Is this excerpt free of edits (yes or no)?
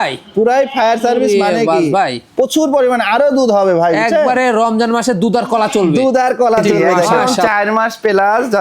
no